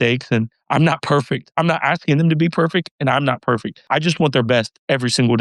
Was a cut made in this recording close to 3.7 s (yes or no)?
yes